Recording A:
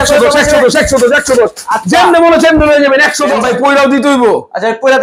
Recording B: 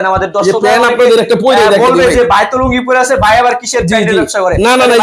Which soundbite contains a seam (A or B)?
A